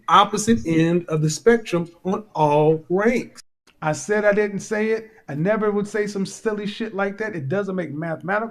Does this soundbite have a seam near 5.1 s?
no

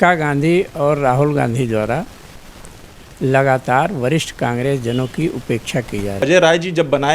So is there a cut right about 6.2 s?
yes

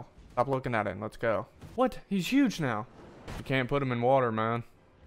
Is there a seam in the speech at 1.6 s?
yes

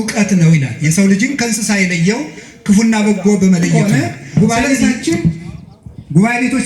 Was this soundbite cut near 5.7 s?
no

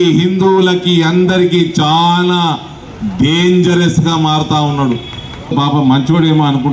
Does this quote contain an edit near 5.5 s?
yes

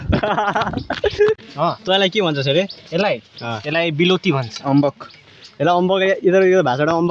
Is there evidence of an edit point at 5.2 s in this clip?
no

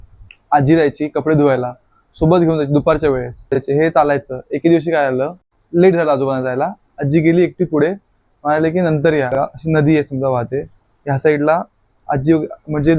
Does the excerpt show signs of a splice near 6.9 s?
no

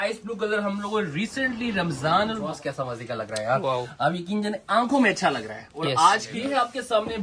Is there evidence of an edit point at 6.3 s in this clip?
yes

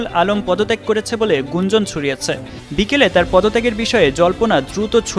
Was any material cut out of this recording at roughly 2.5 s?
yes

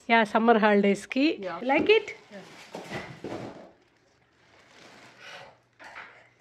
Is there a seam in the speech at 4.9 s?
no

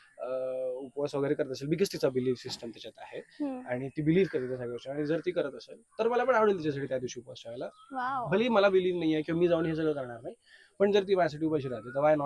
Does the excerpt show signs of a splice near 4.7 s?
no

